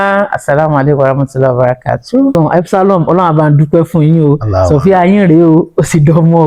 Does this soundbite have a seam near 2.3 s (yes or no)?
yes